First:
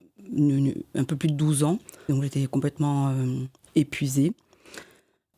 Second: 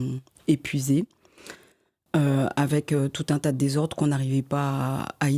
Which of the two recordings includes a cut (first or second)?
first